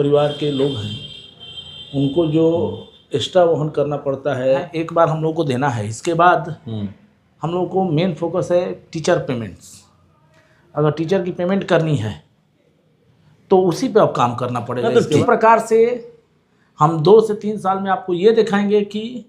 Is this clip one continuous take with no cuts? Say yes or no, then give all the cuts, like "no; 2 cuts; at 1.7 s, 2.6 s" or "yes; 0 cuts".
no; 2 cuts; at 4.7 s, 15.2 s